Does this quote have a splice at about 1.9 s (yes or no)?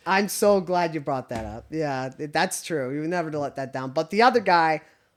no